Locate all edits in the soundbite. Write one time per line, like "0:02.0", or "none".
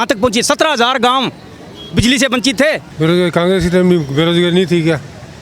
0:02.9